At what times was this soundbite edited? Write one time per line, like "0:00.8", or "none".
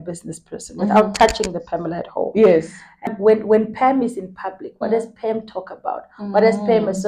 0:03.1